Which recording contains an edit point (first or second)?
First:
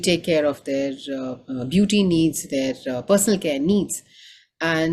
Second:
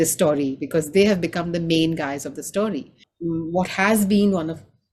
second